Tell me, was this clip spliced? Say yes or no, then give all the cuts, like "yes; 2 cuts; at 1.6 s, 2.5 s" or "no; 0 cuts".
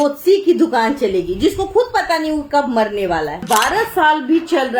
yes; 1 cut; at 3.4 s